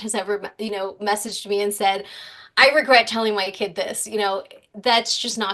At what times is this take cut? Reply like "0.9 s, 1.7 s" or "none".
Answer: none